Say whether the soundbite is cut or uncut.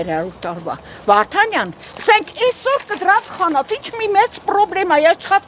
uncut